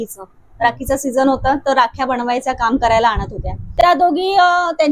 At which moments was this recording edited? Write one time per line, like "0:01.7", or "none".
0:03.6